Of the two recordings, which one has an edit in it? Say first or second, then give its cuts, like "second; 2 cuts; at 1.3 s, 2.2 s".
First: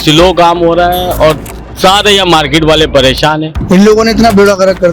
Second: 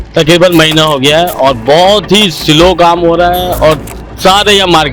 first; 1 cut; at 3.5 s